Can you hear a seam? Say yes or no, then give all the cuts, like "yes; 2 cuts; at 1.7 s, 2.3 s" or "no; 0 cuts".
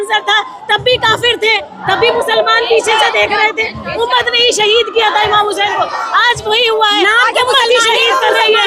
no; 0 cuts